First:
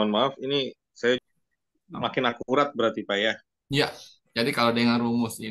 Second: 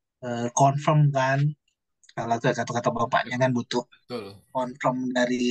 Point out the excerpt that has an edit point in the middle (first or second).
first